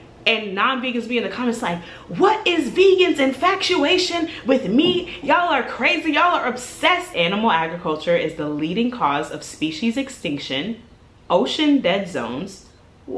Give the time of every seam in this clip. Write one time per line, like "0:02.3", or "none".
0:07.1